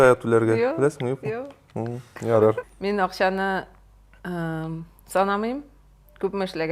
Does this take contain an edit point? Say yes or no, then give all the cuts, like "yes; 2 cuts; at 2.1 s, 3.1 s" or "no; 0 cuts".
yes; 1 cut; at 2.6 s